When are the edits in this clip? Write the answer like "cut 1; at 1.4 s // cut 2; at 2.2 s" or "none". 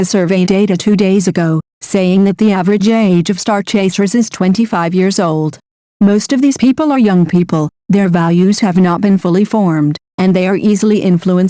cut 1; at 9.2 s